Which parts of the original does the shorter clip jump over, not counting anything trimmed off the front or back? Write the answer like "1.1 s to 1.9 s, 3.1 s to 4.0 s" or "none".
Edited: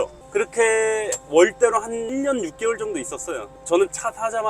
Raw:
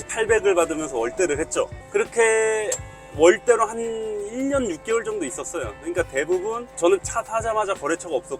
2.8 s to 3.0 s, 3.9 s to 4.3 s, 5.8 s to 6.7 s